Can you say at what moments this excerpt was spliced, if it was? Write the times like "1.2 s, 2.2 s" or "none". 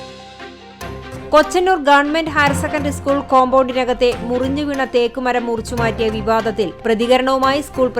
1.3 s